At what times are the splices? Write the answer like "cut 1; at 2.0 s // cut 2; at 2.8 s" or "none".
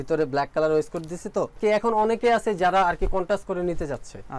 cut 1; at 1.5 s